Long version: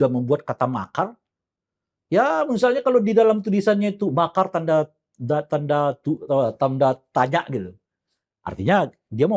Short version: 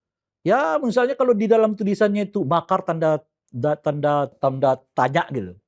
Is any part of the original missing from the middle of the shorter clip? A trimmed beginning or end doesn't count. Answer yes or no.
yes